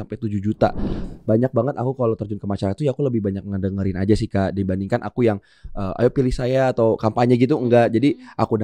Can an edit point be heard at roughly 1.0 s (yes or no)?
yes